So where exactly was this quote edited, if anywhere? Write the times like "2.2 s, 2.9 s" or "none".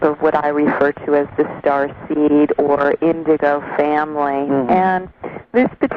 none